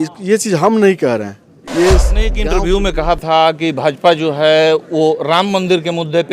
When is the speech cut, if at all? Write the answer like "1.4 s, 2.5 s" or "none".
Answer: 2.4 s